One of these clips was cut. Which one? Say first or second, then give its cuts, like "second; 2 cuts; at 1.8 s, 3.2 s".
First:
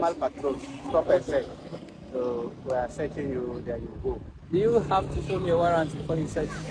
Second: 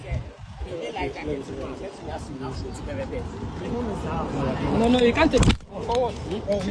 first; 1 cut; at 2.2 s